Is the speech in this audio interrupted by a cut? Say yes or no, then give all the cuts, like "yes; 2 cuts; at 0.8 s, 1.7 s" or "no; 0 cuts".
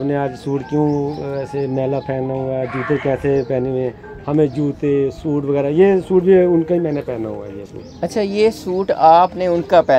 no; 0 cuts